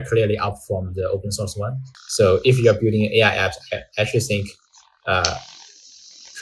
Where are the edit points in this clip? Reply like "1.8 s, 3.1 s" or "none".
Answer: 1.8 s